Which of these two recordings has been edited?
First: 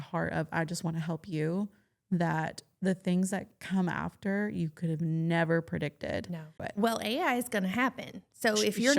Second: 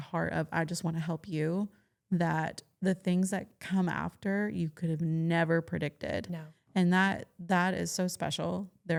first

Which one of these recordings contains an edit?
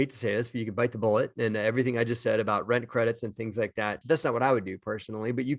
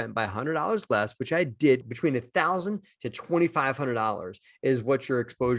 second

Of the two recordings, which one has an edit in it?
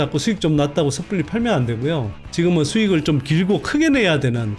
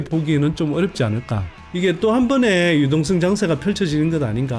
second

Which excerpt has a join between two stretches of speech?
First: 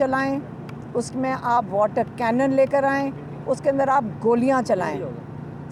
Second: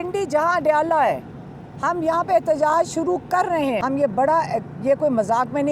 second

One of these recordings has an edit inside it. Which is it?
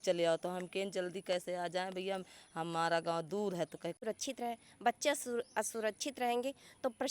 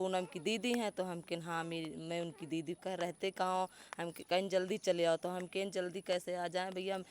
first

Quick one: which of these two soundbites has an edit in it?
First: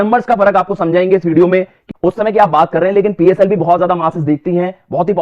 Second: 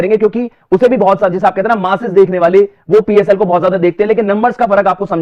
first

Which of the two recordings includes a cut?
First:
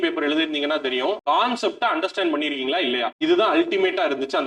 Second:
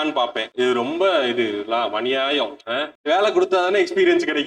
second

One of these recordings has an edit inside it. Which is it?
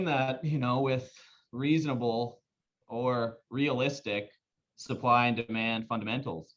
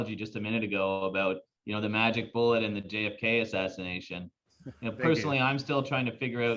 first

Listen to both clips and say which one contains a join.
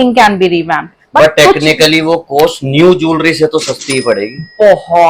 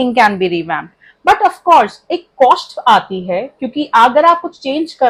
first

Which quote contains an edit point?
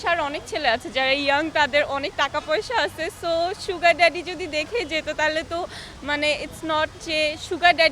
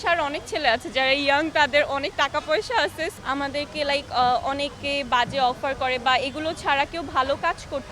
second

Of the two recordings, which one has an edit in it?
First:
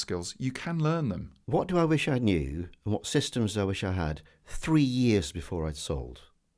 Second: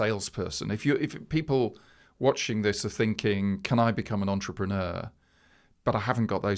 first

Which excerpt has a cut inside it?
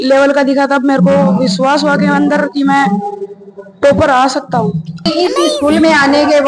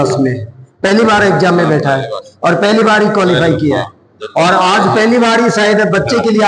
first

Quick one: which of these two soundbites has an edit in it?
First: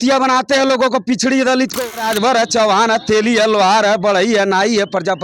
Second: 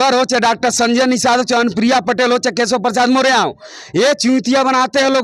first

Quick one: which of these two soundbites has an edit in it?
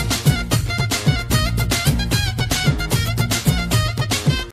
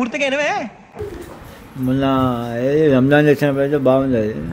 second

